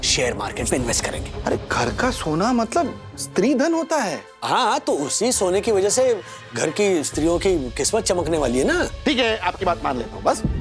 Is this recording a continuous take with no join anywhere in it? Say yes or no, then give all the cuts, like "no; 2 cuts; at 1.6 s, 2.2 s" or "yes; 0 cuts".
no; 2 cuts; at 1.3 s, 8.9 s